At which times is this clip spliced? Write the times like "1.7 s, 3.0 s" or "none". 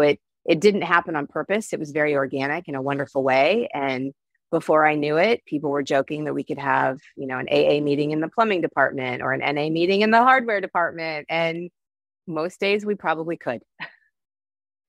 none